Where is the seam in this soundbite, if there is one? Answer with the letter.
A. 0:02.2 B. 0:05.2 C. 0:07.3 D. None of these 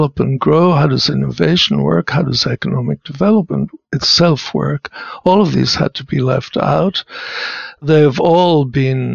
D